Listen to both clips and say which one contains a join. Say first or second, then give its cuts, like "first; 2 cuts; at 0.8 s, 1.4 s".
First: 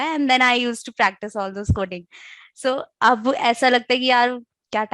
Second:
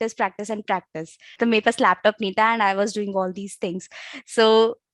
second; 1 cut; at 1.3 s